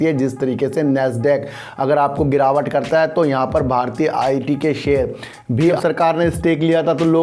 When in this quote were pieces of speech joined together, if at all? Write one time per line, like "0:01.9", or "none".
0:05.7